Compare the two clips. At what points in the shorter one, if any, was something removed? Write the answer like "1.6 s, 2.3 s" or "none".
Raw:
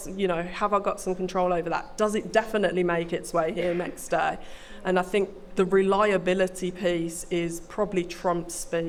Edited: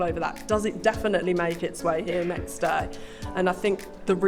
none